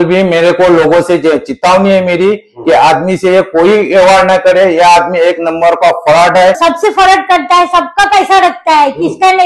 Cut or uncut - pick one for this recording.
cut